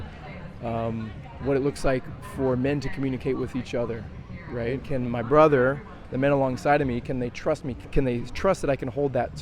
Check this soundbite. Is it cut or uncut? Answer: cut